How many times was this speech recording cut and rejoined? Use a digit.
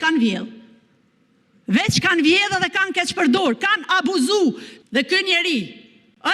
1